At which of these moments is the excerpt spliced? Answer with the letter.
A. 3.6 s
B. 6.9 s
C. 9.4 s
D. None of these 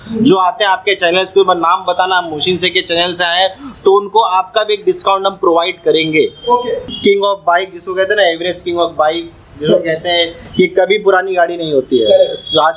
B